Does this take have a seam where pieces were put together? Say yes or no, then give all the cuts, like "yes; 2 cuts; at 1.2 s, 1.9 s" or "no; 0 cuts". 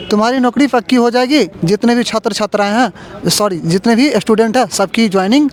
no; 0 cuts